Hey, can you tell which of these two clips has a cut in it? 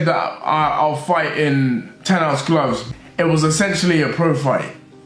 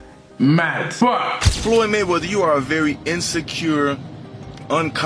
second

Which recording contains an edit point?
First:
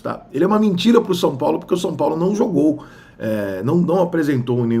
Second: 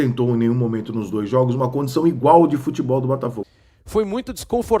second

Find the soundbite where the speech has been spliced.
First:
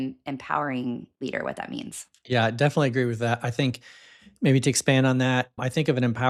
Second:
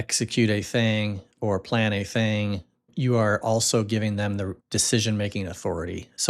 second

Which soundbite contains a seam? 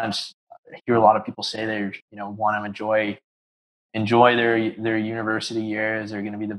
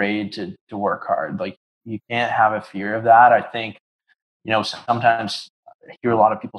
second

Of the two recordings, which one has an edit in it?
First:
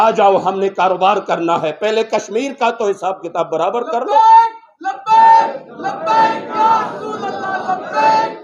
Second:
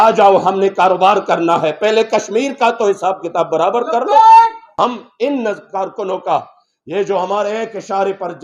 second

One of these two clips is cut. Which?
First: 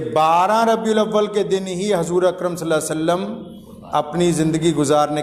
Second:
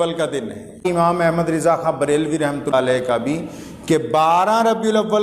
second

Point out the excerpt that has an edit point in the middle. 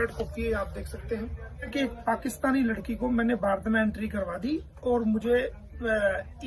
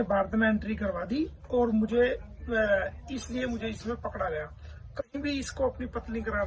first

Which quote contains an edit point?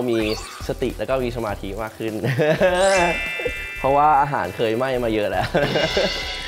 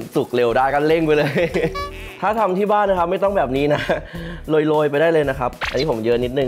second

